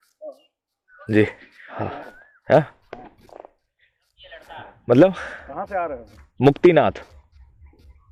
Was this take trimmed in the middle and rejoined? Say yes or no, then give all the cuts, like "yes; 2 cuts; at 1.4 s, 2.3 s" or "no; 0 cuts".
no; 0 cuts